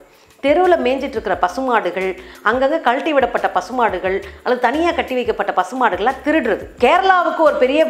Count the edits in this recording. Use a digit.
1